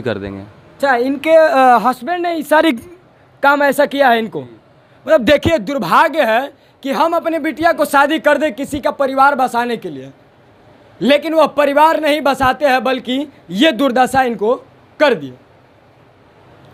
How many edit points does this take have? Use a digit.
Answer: 0